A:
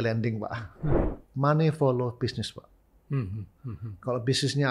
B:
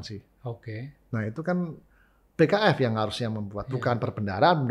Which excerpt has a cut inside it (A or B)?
A